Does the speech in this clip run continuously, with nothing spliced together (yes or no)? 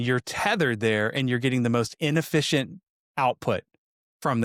yes